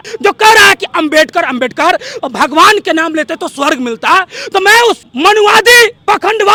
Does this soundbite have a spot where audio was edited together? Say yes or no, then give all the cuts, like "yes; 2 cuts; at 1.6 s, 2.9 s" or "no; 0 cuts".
no; 0 cuts